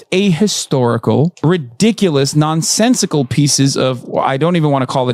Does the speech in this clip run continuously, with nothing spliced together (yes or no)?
yes